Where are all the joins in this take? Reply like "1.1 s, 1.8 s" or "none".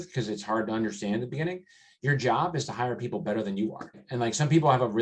4.0 s